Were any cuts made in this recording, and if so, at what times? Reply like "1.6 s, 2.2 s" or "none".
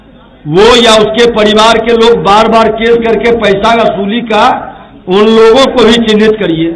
none